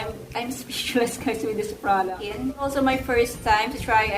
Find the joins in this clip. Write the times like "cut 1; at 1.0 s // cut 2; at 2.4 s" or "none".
cut 1; at 2.2 s

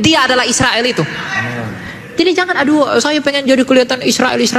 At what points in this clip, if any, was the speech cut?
cut 1; at 2.1 s

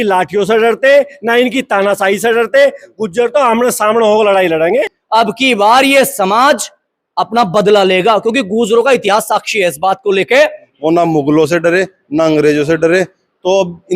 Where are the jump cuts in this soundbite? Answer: cut 1; at 5.0 s // cut 2; at 10.7 s

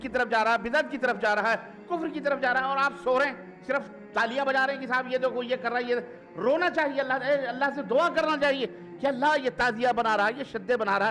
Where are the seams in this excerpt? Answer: none

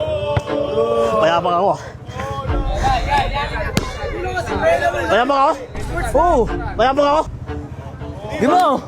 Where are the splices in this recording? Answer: cut 1; at 7.3 s

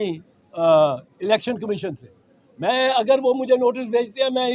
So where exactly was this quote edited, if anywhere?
none

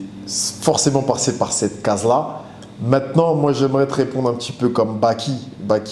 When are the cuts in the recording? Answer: none

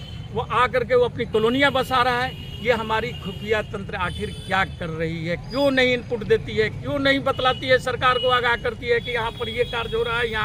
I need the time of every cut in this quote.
none

